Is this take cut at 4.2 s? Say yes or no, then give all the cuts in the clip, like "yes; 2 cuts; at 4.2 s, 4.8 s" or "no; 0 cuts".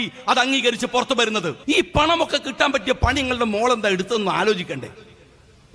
no; 1 cut; at 1.5 s